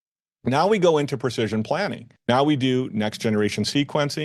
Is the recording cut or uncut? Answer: cut